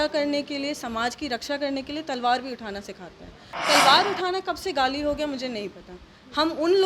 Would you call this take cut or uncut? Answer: cut